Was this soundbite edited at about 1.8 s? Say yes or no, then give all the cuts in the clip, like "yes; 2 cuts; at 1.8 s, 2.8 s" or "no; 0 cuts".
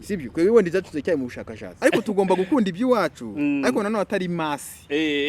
yes; 1 cut; at 1.8 s